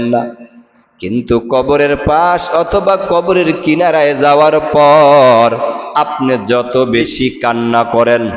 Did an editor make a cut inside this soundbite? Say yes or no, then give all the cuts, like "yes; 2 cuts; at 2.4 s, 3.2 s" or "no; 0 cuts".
yes; 1 cut; at 7.1 s